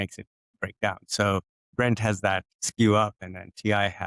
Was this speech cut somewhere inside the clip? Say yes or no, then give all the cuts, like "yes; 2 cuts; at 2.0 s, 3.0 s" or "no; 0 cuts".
yes; 2 cuts; at 1.6 s, 2.6 s